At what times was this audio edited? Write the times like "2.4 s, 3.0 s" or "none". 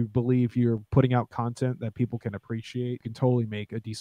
3.1 s